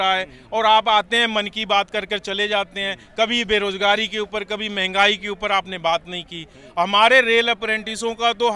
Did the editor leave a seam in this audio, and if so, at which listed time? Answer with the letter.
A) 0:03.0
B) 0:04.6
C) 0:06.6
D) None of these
D